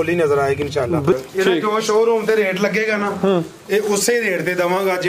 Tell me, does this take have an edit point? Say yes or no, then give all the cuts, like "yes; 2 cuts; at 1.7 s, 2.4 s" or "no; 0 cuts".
yes; 1 cut; at 1.1 s